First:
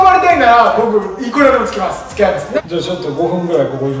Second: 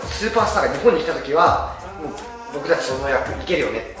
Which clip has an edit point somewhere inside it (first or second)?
first